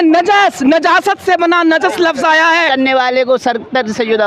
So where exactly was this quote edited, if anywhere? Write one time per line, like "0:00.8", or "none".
0:02.7